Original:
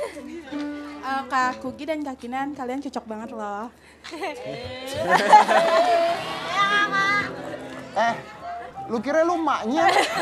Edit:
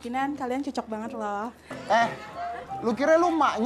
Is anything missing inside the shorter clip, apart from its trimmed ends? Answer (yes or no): yes